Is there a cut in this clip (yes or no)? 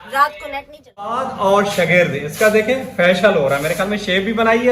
yes